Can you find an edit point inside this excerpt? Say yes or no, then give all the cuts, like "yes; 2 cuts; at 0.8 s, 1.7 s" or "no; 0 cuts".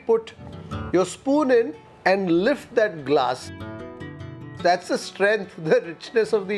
no; 0 cuts